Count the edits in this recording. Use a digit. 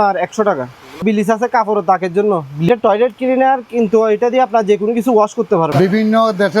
3